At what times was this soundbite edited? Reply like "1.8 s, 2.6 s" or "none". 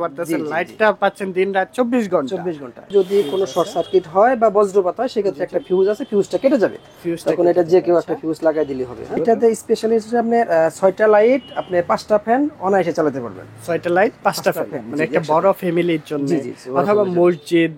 2.9 s, 9.2 s